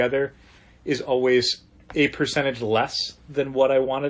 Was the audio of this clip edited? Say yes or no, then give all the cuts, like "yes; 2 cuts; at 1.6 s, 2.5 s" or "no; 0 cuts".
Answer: no; 0 cuts